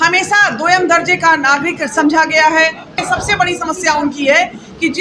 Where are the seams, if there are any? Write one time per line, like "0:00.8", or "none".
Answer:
0:03.0